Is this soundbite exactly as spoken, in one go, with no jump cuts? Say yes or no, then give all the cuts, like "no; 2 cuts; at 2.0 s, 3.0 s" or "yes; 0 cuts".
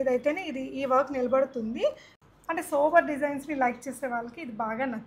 no; 1 cut; at 2.1 s